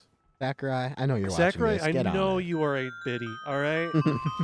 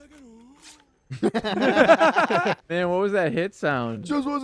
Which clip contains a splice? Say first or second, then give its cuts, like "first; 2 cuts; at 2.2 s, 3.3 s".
second; 1 cut; at 2.6 s